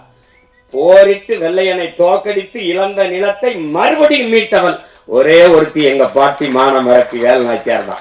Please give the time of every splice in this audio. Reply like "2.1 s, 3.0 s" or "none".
none